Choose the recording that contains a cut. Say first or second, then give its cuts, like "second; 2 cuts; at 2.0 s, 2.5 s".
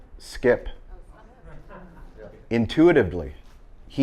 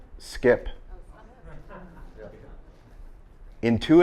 first; 1 cut; at 2.4 s